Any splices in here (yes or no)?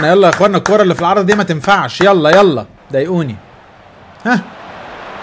no